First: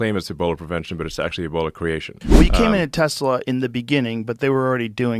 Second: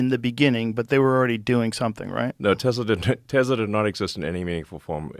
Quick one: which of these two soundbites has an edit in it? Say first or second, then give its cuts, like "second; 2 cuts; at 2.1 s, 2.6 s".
first; 1 cut; at 2.2 s